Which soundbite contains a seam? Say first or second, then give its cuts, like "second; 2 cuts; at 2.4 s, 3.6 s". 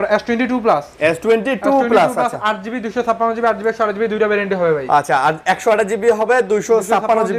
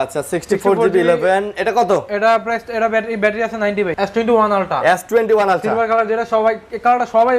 second; 1 cut; at 3.9 s